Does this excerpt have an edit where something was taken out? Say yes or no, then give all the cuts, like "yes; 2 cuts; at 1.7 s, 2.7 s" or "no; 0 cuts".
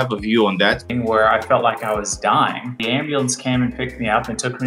yes; 2 cuts; at 0.8 s, 2.8 s